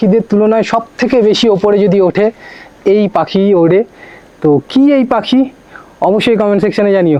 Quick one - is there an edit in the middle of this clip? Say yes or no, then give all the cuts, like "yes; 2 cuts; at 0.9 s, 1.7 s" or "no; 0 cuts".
no; 0 cuts